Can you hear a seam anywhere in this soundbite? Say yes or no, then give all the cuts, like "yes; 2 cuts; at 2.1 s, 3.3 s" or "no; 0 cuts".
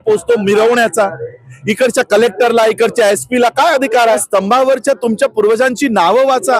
yes; 1 cut; at 4.2 s